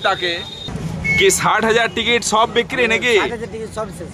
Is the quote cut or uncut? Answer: uncut